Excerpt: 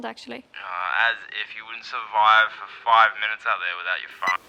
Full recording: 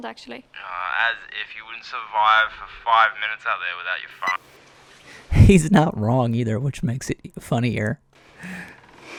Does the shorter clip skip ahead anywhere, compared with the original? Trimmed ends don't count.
no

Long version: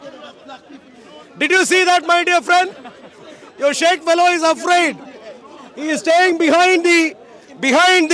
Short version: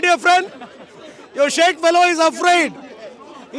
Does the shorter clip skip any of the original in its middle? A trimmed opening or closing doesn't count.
no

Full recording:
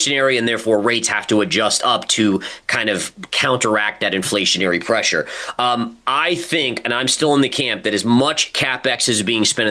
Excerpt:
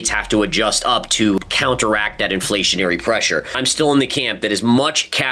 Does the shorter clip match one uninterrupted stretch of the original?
no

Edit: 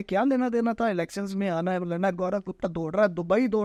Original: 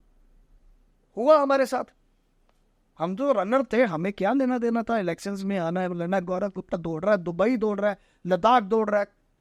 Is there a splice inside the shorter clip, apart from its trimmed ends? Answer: no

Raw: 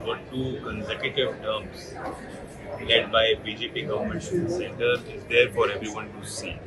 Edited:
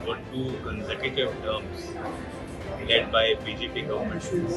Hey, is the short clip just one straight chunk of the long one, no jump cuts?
yes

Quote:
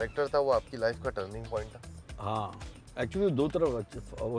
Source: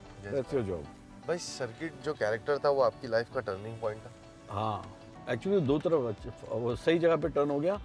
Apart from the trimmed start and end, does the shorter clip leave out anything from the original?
no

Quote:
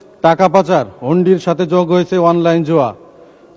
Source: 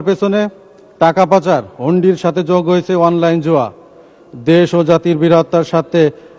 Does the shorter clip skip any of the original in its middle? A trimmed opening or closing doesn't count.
no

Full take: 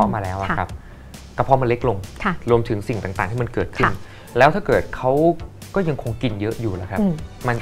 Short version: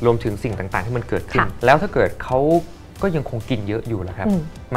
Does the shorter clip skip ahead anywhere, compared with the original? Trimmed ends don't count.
yes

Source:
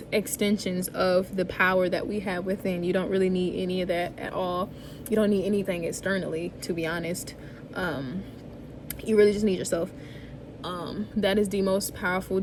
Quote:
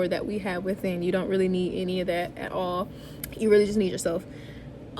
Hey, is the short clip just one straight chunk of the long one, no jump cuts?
no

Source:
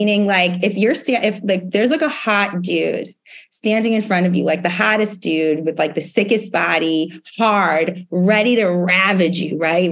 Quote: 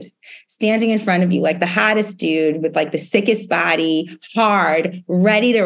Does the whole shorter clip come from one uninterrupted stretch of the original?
yes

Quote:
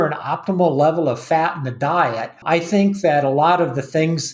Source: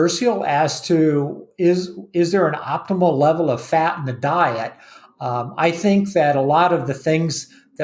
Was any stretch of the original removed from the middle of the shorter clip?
yes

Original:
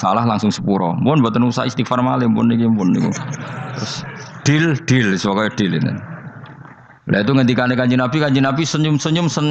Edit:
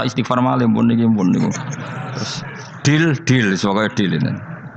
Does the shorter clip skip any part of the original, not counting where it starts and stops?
no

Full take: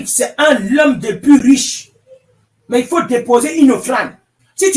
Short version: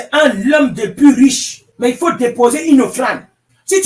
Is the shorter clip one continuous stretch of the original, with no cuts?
no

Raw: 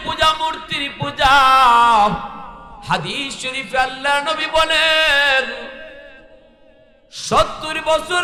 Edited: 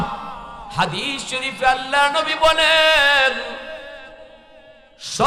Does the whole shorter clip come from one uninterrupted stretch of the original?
yes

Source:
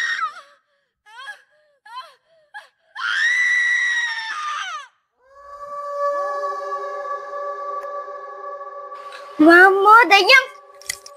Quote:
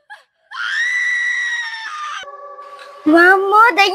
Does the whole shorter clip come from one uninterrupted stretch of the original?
no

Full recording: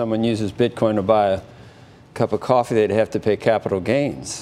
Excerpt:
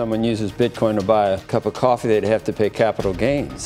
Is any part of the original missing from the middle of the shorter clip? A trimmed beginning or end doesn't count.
yes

